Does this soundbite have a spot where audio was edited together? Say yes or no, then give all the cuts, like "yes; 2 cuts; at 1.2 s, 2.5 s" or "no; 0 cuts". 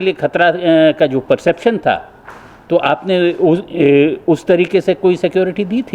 no; 0 cuts